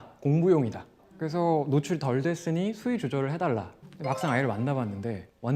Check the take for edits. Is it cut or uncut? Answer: cut